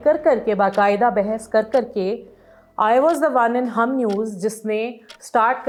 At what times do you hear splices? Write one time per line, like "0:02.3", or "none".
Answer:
none